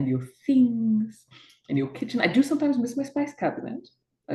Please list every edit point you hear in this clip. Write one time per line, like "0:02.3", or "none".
none